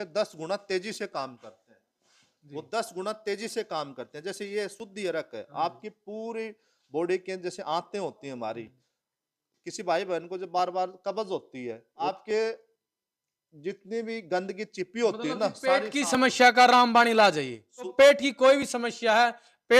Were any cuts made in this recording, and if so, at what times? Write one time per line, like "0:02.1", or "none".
0:11.9
0:17.9